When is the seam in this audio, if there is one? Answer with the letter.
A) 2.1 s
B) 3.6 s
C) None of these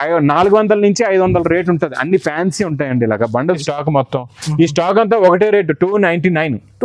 B